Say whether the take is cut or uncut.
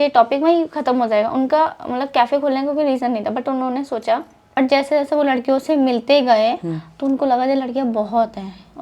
cut